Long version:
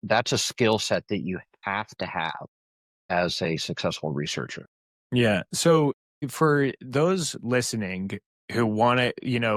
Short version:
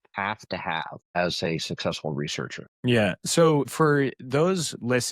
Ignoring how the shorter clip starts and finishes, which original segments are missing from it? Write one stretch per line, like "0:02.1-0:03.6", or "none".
0:02.6-0:03.1
0:04.6-0:04.9
0:06.0-0:06.3